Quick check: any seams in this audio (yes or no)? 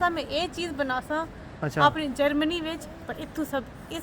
no